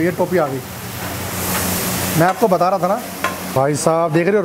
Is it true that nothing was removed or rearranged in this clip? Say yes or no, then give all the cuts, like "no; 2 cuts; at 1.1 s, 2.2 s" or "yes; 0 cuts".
no; 1 cut; at 3.4 s